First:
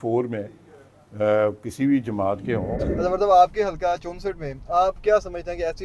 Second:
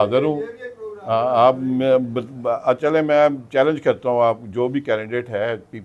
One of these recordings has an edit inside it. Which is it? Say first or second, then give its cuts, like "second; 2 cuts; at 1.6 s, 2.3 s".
first; 1 cut; at 2.7 s